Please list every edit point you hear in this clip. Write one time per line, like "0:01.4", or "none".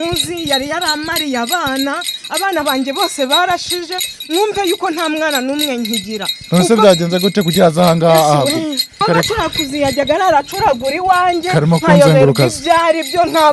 0:09.0